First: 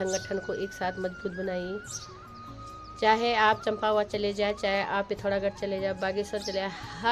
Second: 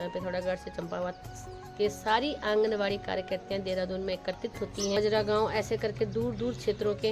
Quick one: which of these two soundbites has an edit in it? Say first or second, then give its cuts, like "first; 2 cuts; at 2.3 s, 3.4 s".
second; 1 cut; at 5.0 s